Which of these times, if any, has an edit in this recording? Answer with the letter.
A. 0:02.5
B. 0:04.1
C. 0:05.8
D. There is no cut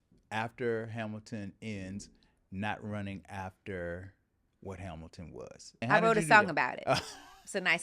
C